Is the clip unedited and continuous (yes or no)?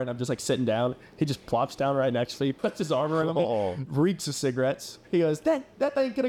no